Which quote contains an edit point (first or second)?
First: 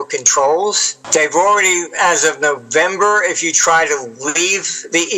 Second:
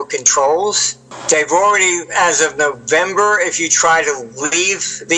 first